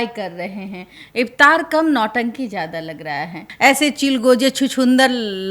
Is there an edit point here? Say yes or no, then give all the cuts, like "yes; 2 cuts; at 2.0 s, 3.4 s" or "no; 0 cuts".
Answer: yes; 1 cut; at 3.4 s